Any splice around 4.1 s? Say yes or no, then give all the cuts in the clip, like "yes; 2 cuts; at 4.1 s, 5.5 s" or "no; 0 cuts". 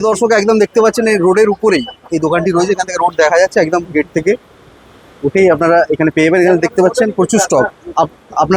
no; 0 cuts